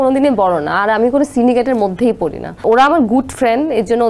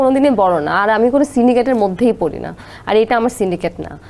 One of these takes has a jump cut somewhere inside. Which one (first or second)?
first